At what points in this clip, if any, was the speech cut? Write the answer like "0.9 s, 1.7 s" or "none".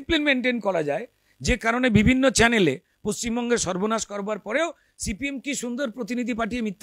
none